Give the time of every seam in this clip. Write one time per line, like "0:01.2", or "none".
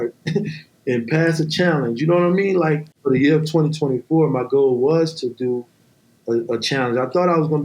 0:02.9